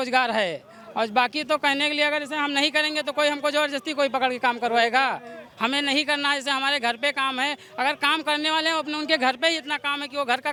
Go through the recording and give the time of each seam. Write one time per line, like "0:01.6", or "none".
none